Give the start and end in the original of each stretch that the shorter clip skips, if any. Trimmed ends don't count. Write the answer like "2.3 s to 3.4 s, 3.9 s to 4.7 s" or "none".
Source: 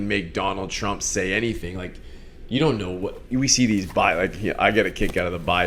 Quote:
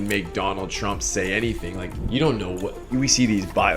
1.9 s to 2.3 s